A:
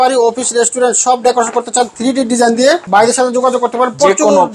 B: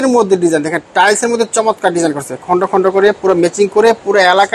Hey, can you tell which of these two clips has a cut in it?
A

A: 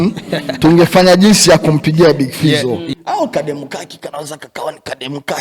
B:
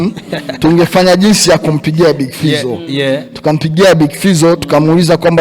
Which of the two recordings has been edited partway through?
A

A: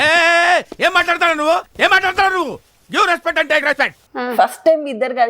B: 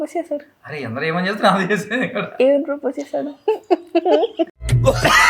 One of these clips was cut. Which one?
A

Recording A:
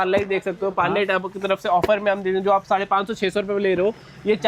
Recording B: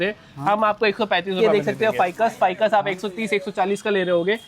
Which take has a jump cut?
B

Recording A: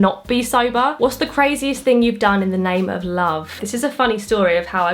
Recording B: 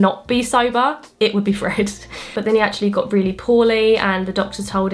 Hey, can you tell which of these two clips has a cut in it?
A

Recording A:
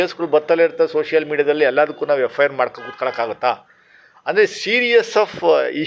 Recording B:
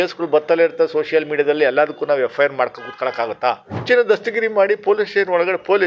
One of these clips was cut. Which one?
B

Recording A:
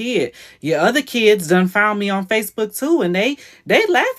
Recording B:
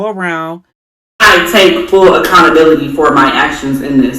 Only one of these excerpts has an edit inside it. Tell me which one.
B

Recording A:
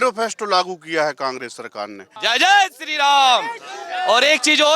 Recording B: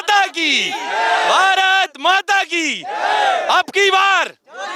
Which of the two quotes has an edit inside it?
A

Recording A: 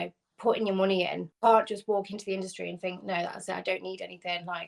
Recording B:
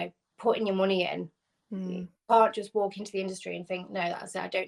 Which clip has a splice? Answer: A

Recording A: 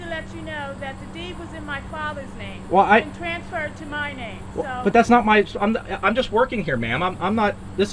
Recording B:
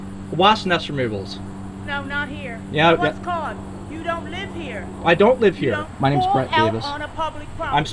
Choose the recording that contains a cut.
B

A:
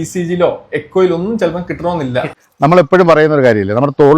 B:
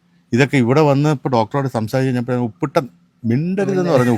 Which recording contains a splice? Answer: A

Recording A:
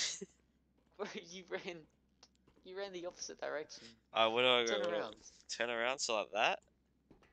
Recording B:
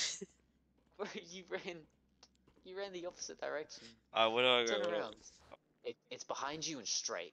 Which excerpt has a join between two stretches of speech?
B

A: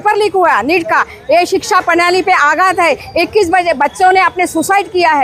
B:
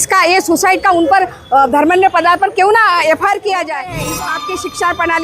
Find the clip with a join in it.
B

